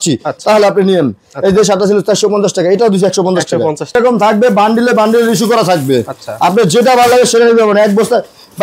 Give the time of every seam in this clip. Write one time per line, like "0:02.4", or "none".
0:03.9